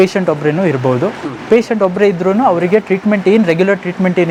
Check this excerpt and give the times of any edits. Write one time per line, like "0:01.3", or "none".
none